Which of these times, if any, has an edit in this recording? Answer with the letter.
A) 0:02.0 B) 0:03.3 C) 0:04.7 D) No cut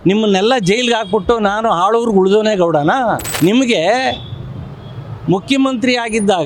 B